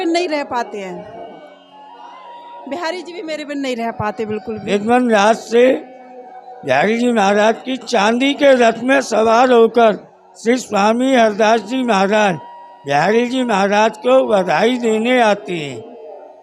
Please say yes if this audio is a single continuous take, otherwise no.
no